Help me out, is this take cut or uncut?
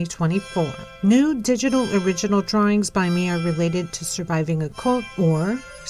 uncut